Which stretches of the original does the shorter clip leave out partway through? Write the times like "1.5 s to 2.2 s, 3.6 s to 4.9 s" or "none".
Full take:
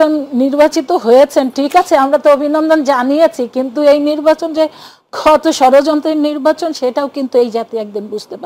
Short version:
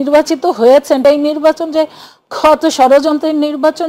1.5 s to 3.8 s